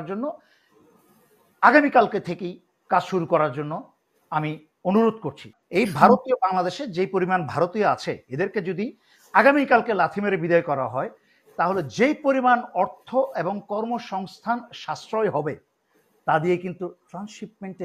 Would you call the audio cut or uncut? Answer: cut